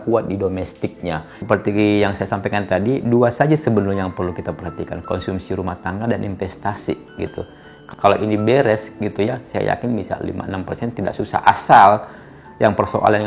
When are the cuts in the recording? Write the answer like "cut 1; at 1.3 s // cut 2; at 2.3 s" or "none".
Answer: cut 1; at 1.3 s